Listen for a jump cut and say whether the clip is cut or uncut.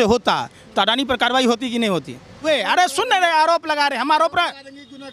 cut